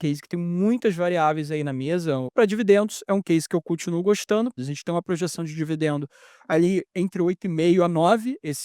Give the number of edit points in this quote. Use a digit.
2